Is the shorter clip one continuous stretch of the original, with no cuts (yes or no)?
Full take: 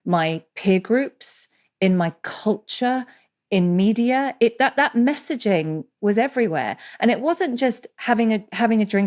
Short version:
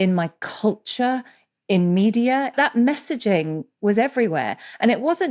no